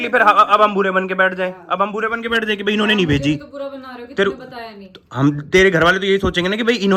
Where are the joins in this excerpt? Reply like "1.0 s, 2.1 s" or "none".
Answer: none